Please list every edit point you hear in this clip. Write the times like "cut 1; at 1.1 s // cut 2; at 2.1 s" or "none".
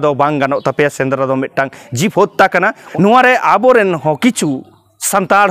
cut 1; at 2.8 s

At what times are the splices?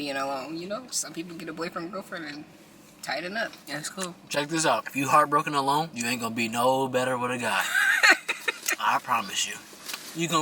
cut 1; at 1.0 s // cut 2; at 3.6 s // cut 3; at 4.9 s // cut 4; at 6.0 s

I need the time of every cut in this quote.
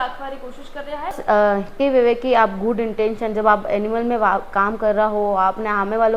cut 1; at 1.2 s

